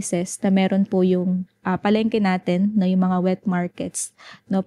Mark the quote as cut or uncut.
uncut